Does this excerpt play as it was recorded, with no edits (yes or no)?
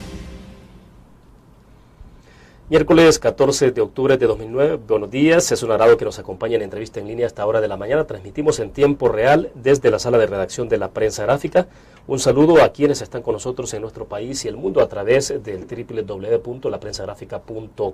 no